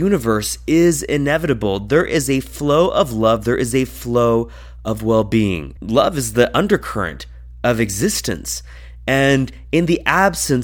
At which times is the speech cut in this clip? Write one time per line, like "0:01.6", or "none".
none